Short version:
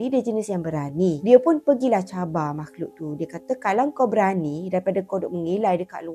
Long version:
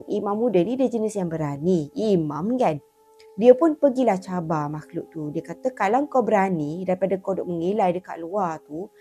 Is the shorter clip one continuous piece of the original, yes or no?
no